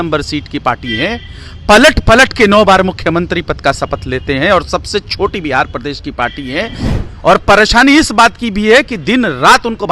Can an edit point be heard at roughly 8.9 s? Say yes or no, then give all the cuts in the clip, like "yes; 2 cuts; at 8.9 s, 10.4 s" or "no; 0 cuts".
no; 1 cut; at 6.8 s